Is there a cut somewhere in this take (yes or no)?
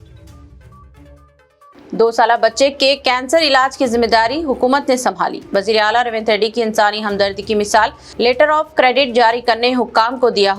yes